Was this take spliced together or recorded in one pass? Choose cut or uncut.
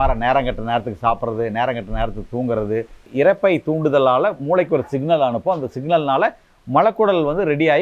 cut